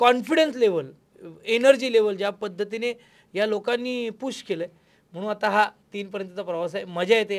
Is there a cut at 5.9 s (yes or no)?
no